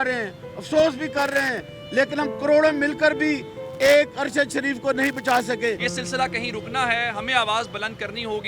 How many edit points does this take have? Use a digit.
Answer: 1